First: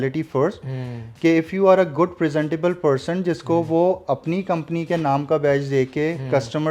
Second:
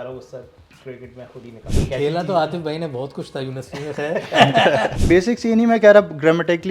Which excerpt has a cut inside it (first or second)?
second